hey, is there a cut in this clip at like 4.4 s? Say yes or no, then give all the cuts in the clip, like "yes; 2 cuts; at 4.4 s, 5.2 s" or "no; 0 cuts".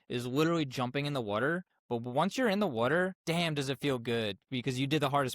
no; 2 cuts; at 1.7 s, 3.2 s